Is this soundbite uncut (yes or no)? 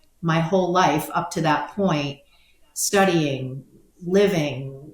yes